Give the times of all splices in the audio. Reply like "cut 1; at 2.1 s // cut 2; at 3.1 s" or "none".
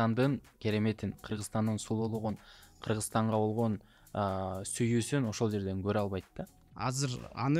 cut 1; at 6.7 s